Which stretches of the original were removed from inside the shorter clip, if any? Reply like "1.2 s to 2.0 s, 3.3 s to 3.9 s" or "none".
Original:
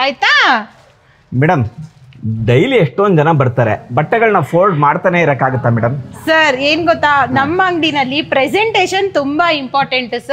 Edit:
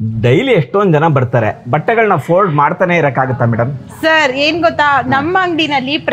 none